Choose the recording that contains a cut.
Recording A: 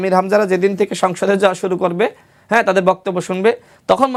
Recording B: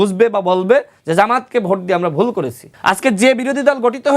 B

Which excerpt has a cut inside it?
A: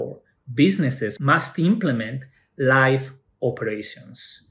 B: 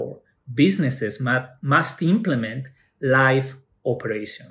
A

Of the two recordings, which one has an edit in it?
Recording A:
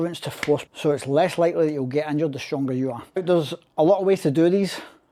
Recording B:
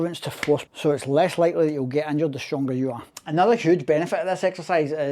B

